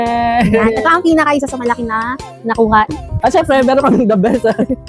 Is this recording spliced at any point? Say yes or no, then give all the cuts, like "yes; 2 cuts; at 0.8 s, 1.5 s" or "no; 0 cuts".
yes; 1 cut; at 3.0 s